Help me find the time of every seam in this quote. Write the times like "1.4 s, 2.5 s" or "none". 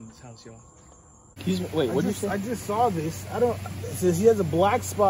1.4 s